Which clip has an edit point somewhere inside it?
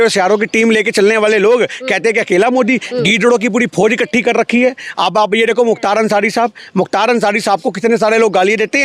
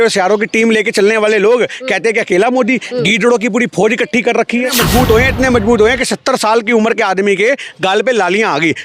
second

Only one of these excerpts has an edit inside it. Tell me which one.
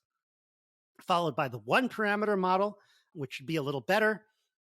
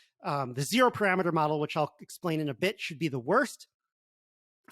first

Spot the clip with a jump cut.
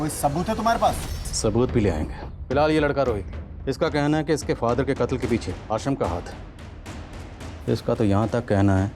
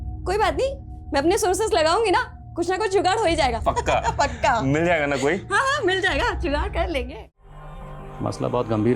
second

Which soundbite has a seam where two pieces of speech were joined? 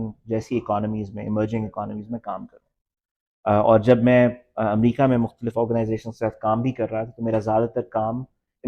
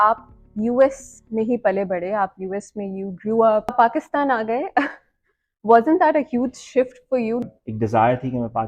second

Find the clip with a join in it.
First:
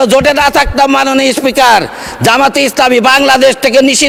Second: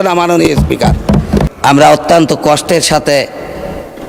second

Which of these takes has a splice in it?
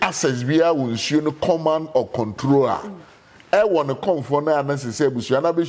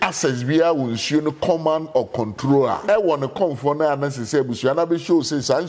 second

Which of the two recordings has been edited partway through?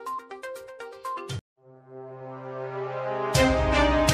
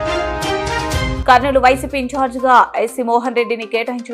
second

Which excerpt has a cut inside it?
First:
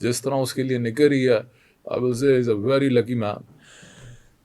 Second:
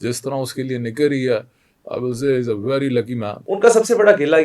second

